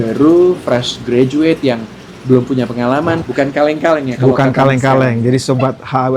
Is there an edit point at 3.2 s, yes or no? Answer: yes